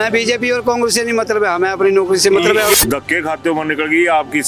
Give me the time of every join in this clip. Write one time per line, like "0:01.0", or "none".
0:02.7

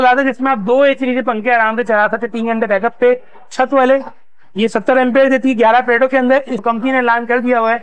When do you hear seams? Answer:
0:06.5

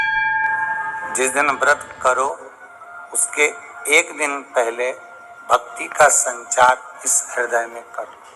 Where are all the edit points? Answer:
0:01.0

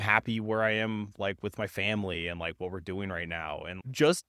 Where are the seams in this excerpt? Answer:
none

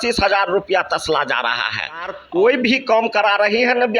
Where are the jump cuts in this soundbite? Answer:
0:02.2

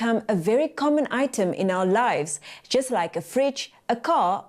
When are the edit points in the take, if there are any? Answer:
0:02.4

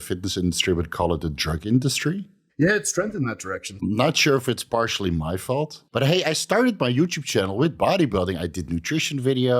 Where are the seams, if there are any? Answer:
0:02.4
0:03.8
0:05.8

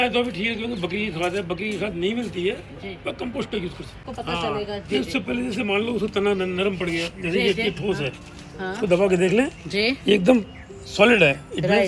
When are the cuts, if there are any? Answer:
0:04.1

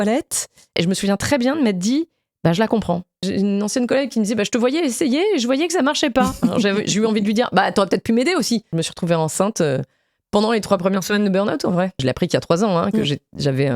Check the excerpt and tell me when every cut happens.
0:00.8
0:03.2
0:08.7
0:12.0

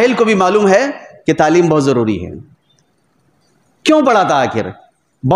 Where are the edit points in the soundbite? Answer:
none

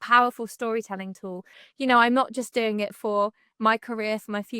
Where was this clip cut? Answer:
0:01.6

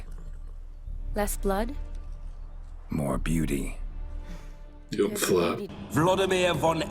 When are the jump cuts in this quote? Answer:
0:05.7

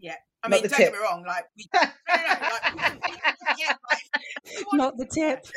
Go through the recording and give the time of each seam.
none

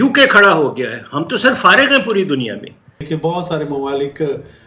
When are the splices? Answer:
0:03.0

